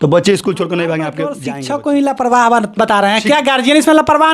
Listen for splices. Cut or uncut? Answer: cut